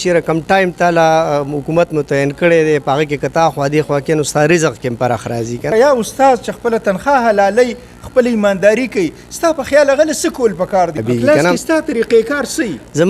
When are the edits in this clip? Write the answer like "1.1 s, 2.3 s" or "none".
5.7 s, 11.0 s